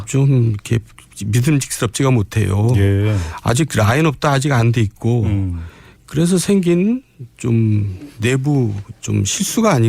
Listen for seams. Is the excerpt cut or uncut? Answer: cut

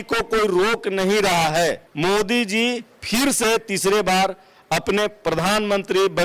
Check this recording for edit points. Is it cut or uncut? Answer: cut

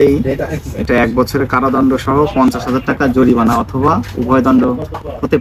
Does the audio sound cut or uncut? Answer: uncut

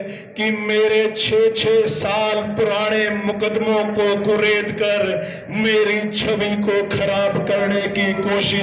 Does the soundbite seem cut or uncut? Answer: uncut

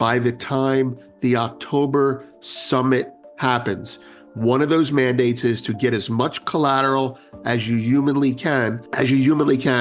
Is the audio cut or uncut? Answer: cut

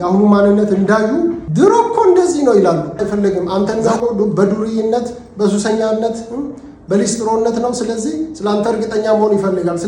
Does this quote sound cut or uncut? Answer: cut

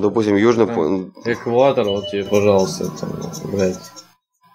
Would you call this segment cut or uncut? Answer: uncut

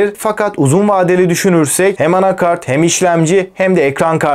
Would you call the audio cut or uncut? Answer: cut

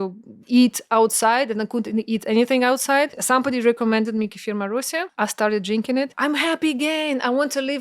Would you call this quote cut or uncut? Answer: cut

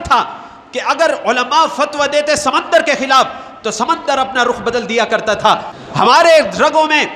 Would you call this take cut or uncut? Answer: cut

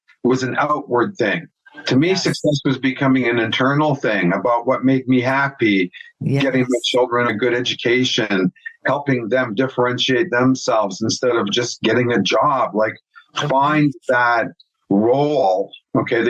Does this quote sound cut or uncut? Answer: cut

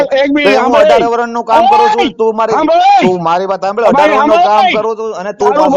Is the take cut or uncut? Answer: uncut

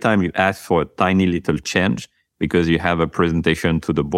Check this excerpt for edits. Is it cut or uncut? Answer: uncut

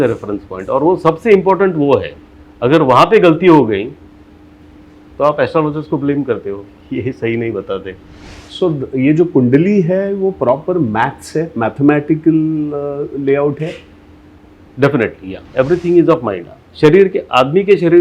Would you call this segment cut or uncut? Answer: cut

